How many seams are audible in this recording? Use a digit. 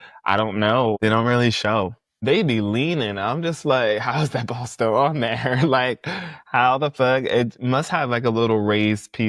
2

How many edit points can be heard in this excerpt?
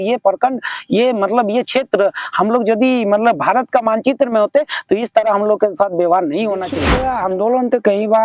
1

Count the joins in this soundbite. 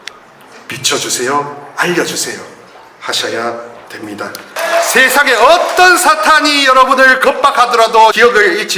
1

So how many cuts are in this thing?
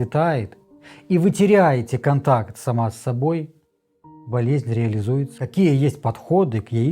1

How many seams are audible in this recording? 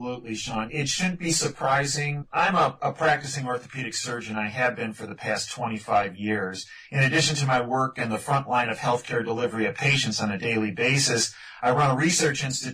1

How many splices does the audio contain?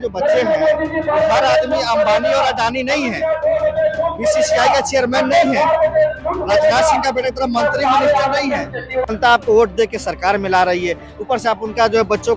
1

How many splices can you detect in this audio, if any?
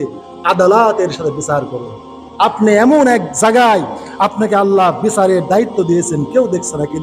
1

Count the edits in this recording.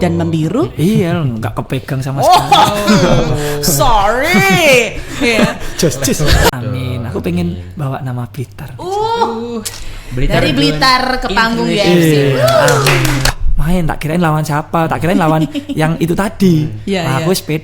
2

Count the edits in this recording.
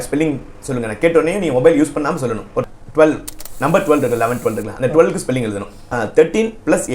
2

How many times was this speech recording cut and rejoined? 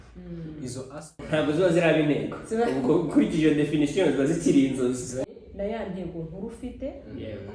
2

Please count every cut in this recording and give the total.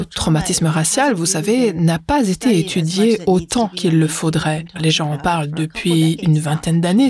2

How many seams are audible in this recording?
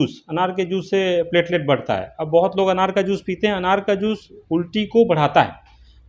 0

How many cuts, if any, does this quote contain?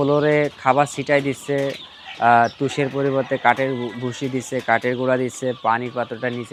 0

